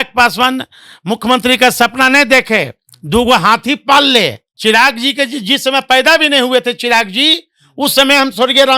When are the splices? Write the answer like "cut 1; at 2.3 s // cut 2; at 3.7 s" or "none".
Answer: cut 1; at 4.5 s